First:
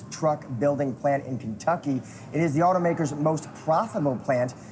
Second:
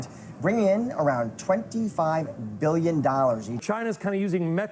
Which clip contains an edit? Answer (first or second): second